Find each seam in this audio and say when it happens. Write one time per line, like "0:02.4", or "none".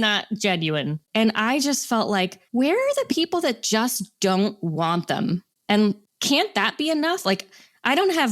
0:01.0
0:02.4